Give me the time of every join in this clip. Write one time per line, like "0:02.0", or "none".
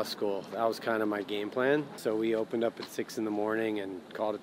0:01.9

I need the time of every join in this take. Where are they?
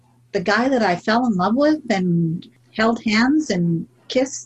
0:02.4

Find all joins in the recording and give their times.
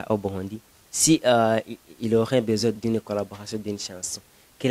0:02.8

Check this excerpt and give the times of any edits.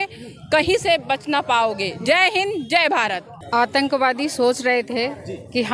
0:03.3

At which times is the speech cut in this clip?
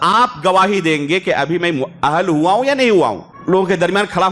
0:03.3

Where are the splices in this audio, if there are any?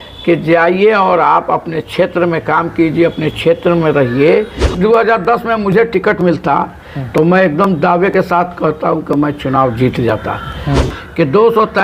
0:04.7
0:10.8

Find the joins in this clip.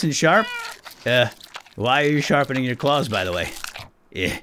none

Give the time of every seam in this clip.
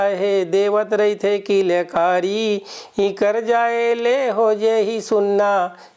none

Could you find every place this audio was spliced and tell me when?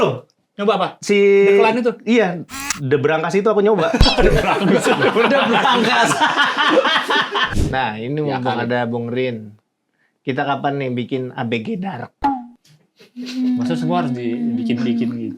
0:07.5

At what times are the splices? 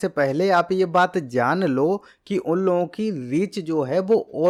none

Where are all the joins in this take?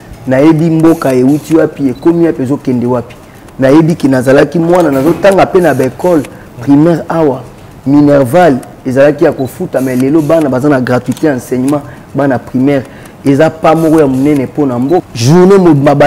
0:15.1

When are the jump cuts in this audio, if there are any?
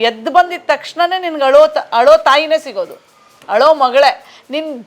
none

